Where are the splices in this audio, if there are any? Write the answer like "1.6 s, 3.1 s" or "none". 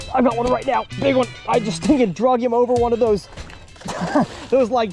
0.9 s

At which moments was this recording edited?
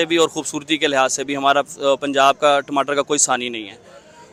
none

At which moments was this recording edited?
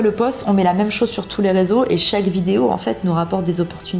none

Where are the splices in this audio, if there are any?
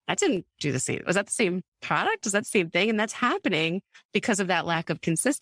1.0 s

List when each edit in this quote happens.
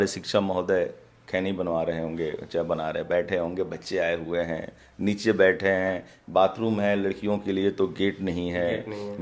none

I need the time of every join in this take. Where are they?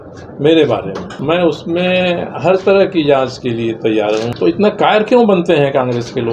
1.0 s, 4.3 s

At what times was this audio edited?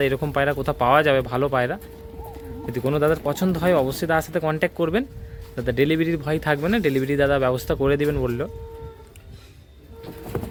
none

